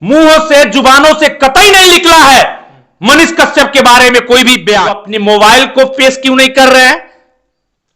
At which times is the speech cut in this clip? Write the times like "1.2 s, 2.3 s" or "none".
5.0 s

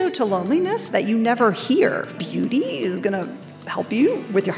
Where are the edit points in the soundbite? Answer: 2.2 s

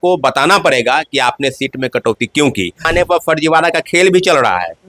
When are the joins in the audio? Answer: 2.9 s

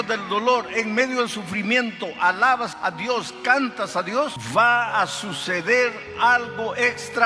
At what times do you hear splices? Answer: 2.7 s, 4.4 s

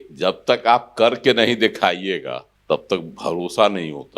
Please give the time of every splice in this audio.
2.5 s

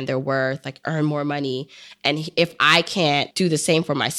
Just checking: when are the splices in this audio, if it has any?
3.3 s

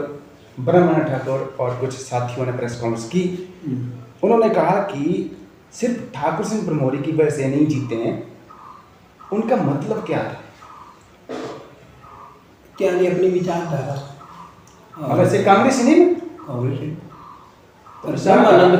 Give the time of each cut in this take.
none

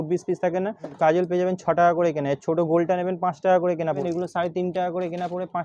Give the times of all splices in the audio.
0.9 s, 4.0 s

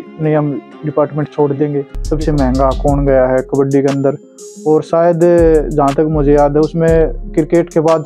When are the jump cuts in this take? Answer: 1.9 s

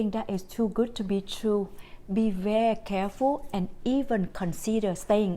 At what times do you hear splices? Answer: none

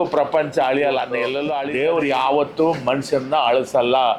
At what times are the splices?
1.5 s

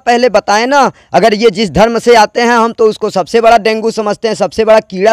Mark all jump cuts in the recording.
none

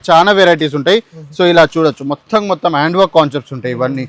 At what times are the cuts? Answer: none

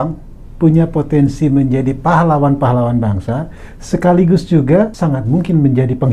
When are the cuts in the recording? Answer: 4.9 s

